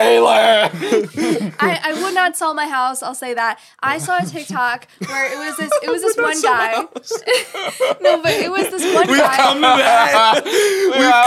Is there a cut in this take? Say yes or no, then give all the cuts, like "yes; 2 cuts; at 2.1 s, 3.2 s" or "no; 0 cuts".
no; 0 cuts